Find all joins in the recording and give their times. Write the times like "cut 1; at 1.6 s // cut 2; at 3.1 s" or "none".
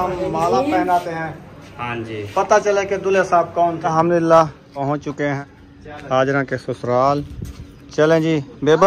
cut 1; at 3.9 s // cut 2; at 4.8 s // cut 3; at 5.6 s